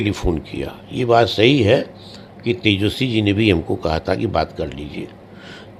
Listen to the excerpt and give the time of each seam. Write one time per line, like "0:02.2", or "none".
none